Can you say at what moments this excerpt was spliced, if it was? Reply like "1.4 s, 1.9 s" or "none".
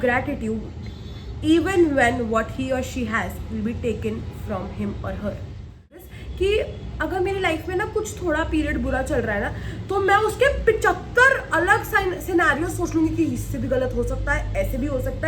6.0 s